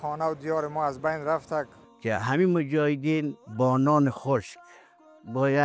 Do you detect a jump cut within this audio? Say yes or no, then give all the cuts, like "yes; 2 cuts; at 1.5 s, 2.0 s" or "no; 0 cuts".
yes; 2 cuts; at 1.8 s, 3.4 s